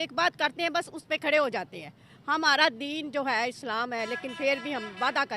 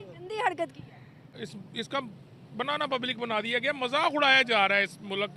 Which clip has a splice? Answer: second; 1 cut; at 1.3 s

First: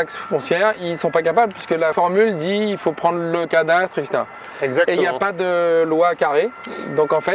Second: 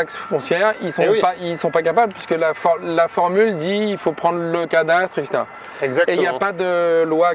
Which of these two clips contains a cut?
first; 2 cuts; at 0.8 s, 1.9 s

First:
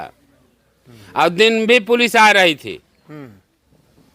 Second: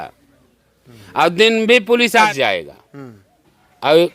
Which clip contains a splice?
second; 1 cut; at 2.3 s

